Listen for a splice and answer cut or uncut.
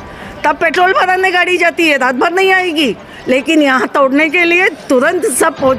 uncut